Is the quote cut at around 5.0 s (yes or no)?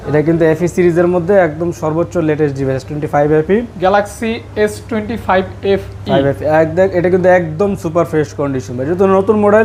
no